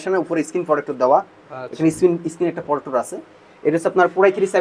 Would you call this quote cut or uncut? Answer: uncut